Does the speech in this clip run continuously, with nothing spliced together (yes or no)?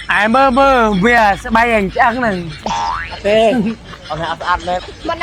yes